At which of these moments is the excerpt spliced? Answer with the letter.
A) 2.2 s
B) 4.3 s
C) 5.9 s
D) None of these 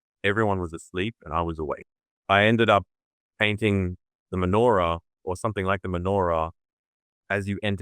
A